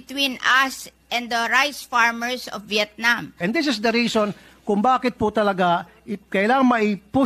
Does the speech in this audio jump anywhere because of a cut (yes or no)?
yes